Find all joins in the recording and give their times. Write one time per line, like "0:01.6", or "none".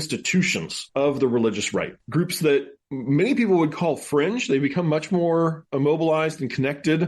0:02.0